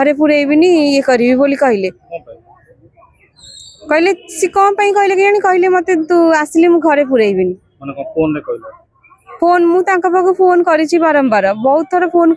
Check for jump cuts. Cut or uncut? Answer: uncut